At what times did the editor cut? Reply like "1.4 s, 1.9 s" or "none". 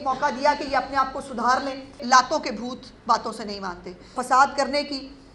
2.0 s, 4.2 s

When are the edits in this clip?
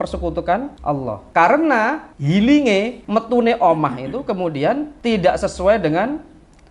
0.9 s, 2.1 s, 3.0 s, 4.9 s

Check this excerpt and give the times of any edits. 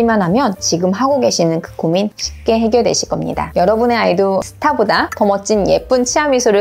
3.5 s

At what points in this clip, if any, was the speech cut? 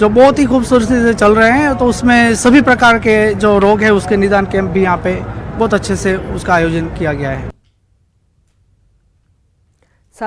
none

